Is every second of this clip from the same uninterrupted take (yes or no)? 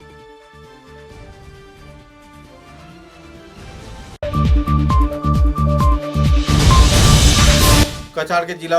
no